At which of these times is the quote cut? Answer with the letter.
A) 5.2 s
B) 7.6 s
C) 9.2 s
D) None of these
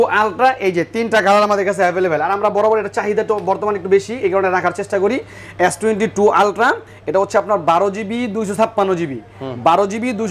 D